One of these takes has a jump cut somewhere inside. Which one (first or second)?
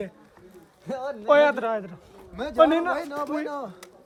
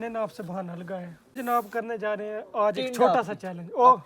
second